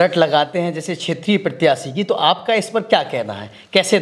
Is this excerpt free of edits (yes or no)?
yes